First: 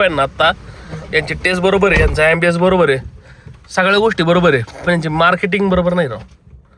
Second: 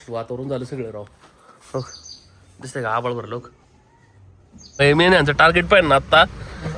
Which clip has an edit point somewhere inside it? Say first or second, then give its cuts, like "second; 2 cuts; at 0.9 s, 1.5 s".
second; 1 cut; at 4.7 s